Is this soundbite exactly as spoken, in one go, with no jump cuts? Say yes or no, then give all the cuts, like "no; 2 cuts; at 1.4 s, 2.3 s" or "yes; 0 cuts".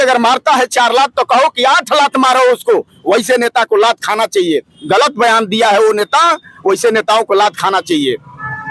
yes; 0 cuts